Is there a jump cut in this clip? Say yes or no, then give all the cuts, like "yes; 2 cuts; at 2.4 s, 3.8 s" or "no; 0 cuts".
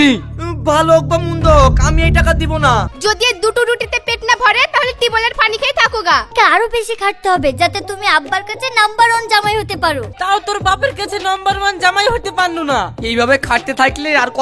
yes; 3 cuts; at 2.9 s, 6.3 s, 10.2 s